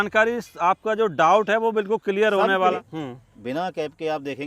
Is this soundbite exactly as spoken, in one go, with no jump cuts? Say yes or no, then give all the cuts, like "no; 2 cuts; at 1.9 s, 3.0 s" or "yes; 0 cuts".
no; 1 cut; at 2.7 s